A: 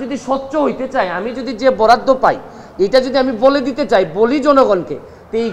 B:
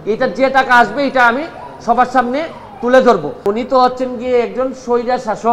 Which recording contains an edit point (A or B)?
B